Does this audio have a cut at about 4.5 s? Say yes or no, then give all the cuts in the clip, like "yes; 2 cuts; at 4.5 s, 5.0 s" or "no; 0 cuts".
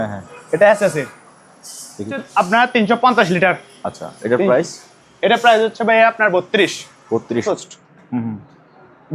no; 2 cuts; at 2.2 s, 7.4 s